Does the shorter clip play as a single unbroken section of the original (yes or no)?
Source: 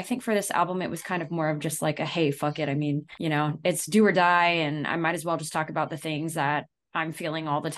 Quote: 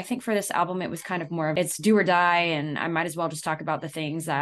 no